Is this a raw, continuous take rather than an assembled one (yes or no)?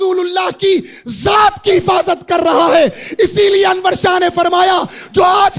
yes